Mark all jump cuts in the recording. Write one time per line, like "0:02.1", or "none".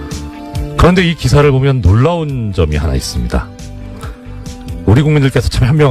0:02.4